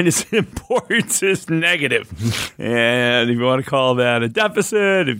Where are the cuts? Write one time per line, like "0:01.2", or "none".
none